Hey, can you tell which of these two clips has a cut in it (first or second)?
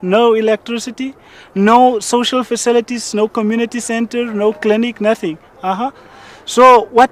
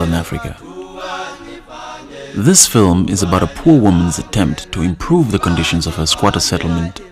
second